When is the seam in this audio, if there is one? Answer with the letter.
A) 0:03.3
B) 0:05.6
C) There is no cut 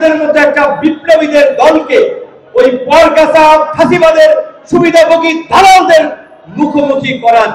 C